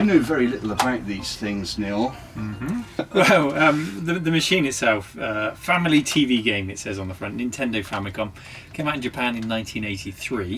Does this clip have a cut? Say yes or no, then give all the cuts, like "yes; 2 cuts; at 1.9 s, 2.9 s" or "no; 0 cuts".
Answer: yes; 1 cut; at 3.1 s